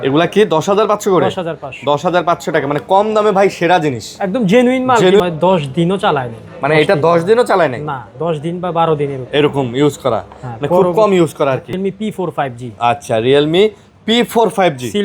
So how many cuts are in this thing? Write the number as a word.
two